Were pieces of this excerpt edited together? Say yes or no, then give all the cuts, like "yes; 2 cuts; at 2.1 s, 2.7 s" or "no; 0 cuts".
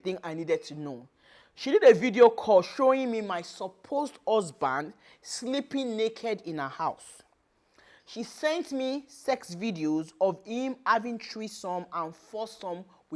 no; 0 cuts